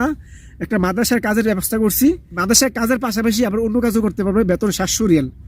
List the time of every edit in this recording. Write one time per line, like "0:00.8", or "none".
0:02.3